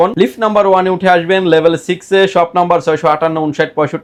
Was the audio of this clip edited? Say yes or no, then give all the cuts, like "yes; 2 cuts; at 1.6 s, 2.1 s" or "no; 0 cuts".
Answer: no; 0 cuts